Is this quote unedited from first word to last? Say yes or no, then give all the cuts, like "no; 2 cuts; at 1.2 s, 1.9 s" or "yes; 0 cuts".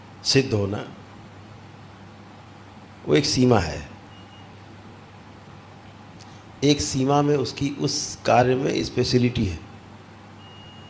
yes; 0 cuts